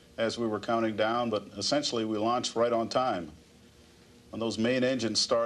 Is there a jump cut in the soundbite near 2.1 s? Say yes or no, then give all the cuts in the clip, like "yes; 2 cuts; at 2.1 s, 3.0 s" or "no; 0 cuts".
yes; 1 cut; at 2.1 s